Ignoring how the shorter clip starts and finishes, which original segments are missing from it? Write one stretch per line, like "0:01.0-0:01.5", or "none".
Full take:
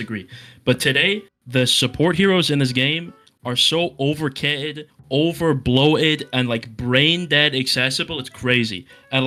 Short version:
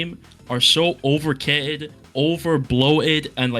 none